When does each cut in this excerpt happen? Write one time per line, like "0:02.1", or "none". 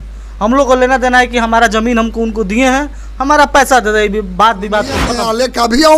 0:05.1